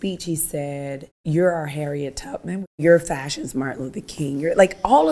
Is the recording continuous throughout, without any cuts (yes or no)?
no